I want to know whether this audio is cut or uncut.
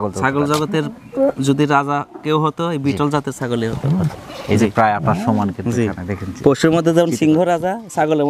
uncut